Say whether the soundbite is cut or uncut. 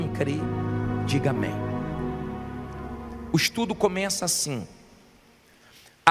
cut